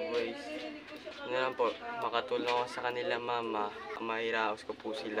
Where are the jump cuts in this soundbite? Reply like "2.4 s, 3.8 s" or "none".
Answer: 4.0 s